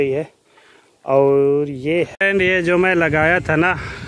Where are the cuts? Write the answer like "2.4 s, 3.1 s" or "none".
2.1 s